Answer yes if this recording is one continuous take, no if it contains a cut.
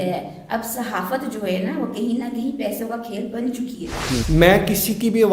no